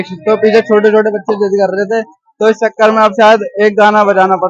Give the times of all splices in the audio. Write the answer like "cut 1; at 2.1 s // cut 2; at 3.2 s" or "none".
none